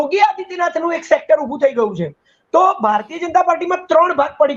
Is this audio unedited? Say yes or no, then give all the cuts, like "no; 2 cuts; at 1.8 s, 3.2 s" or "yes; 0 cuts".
yes; 0 cuts